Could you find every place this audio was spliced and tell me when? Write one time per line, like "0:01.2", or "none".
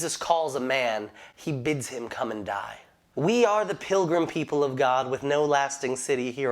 0:03.1